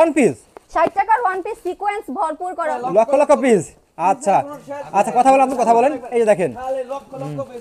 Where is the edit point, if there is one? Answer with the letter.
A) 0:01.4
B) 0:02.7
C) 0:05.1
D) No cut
B